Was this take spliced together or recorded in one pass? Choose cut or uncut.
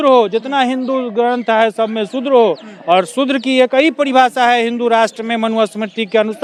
uncut